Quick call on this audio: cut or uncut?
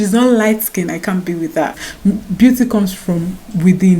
cut